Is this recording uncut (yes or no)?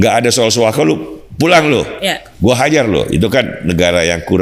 yes